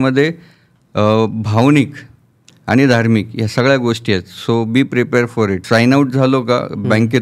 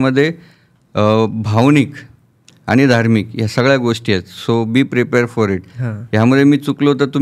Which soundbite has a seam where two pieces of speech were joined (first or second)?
first